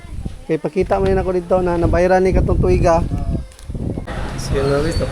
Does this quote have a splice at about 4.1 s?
yes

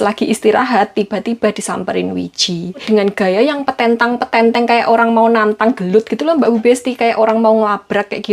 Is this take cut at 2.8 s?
yes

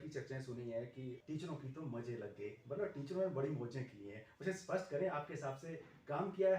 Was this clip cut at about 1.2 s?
yes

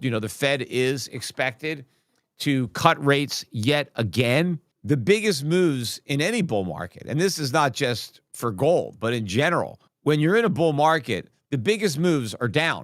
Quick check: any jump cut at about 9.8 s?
yes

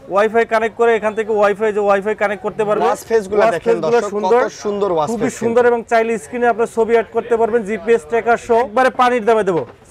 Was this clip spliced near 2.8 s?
yes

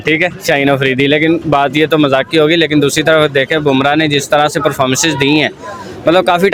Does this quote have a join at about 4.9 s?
no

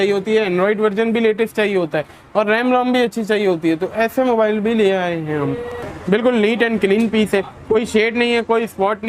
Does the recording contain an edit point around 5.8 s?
yes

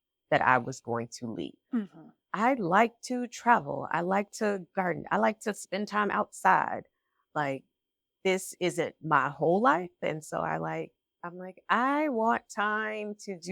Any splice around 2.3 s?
yes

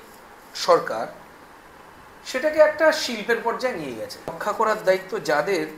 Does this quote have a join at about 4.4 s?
yes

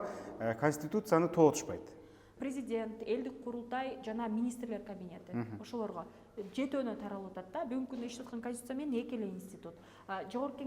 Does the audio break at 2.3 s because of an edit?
yes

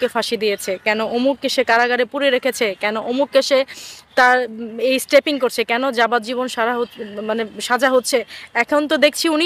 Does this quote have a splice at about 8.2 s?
no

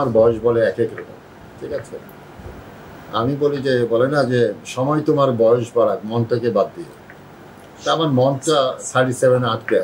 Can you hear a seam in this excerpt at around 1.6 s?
no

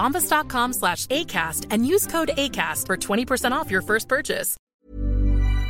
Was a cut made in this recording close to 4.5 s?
yes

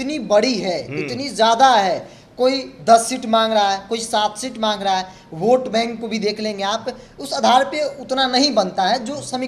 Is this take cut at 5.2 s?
no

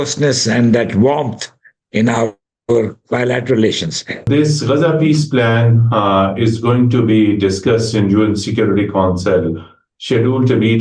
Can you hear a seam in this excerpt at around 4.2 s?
yes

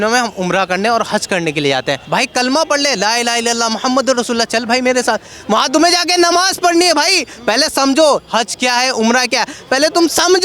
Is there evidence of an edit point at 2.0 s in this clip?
yes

